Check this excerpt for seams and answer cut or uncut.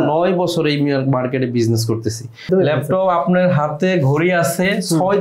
cut